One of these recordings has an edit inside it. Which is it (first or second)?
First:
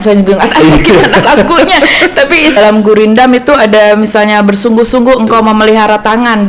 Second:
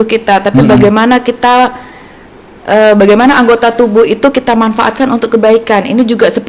first